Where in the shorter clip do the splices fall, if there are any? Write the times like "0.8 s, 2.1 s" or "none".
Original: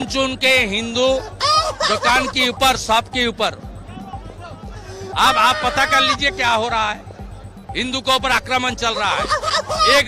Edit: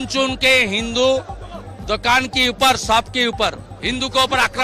3.7 s